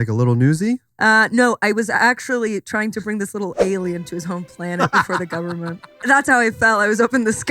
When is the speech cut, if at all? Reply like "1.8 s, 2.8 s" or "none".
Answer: 6.0 s